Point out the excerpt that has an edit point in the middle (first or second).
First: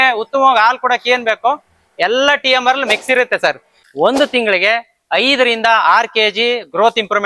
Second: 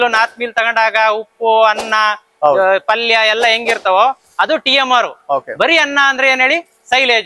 first